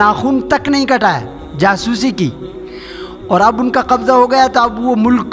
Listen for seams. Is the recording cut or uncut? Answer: uncut